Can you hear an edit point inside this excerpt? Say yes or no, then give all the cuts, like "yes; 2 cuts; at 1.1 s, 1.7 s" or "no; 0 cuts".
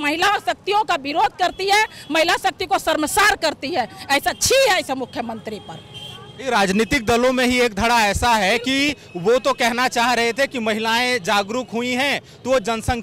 no; 0 cuts